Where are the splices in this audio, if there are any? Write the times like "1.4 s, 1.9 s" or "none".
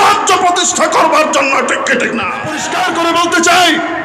2.6 s